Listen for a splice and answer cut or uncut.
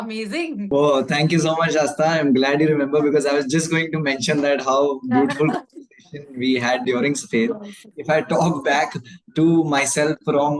cut